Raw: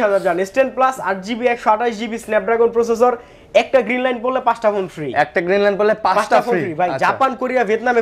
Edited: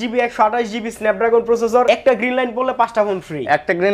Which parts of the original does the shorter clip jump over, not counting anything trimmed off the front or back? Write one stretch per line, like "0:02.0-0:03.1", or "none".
0:03.1-0:03.5

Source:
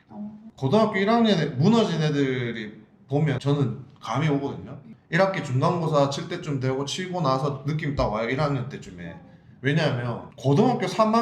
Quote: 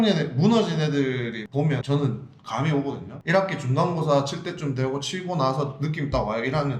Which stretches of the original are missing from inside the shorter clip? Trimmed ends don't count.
0:02.6-0:03.0
0:04.7-0:05.0

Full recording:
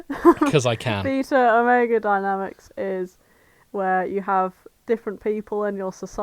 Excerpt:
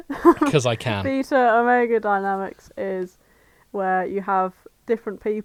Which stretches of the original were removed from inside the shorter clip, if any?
none

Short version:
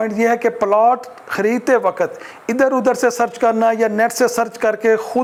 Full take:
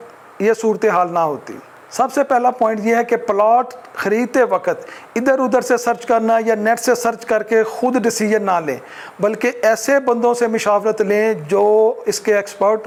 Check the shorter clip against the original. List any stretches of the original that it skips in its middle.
none

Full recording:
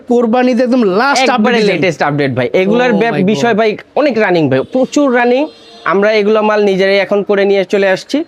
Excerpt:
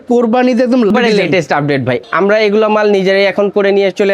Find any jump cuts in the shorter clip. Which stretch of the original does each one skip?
0:00.9-0:01.4
0:02.5-0:05.7

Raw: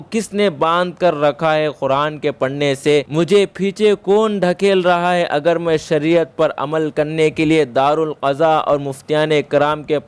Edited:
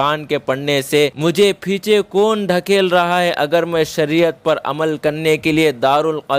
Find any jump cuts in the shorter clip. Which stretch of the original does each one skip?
none

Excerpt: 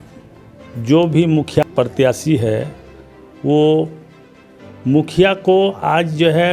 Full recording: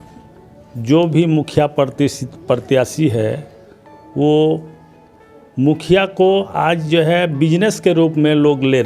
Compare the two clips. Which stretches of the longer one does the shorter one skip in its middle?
0:01.6-0:02.4

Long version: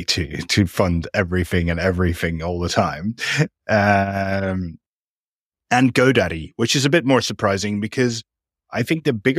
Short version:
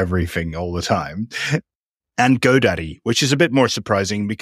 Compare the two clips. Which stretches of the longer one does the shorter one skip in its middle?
0:03.6-0:05.2

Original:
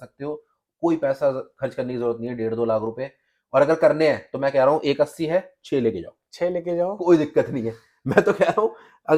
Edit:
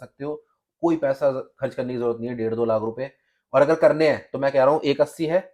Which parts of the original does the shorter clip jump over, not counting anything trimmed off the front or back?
none

